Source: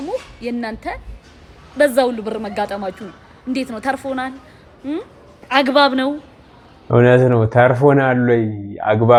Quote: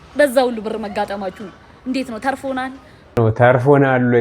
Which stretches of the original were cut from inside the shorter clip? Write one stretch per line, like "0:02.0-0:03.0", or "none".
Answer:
0:04.8-0:07.3